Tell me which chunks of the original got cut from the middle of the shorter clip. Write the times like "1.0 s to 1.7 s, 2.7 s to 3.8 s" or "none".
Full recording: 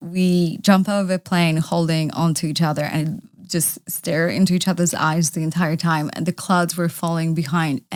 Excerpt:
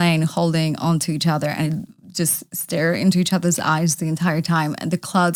none